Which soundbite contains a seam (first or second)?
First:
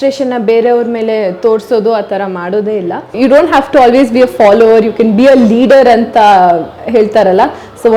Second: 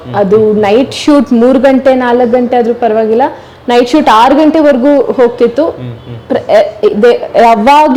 first